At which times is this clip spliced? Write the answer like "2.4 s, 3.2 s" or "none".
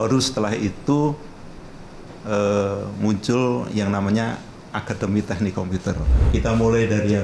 6.1 s